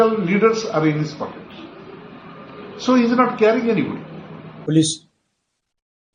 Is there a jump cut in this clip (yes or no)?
yes